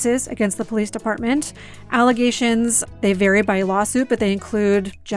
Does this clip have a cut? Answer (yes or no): yes